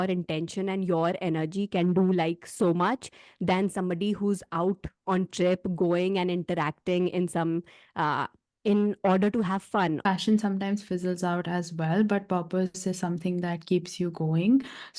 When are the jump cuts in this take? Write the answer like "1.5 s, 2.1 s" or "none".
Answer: 10.1 s